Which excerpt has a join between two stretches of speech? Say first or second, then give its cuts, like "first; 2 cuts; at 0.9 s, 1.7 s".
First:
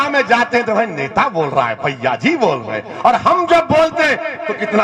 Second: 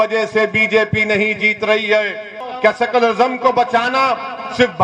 second; 1 cut; at 2.5 s